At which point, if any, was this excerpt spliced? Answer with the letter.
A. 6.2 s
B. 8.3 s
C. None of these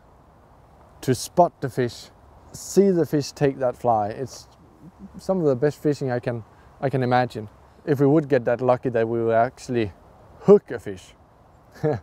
A